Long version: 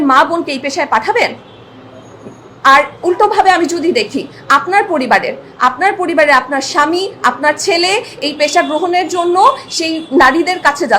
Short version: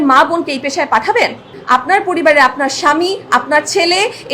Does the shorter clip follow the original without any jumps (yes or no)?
no